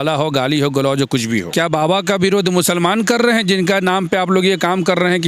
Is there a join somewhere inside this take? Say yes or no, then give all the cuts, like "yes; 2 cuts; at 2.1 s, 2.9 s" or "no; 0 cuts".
yes; 1 cut; at 1.5 s